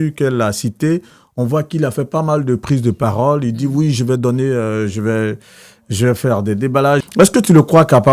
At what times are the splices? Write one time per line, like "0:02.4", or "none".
0:07.0